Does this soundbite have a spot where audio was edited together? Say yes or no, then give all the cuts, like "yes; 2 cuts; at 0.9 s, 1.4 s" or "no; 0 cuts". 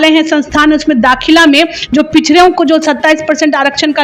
no; 0 cuts